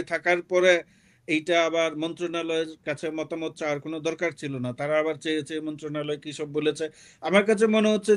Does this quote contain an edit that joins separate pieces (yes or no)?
no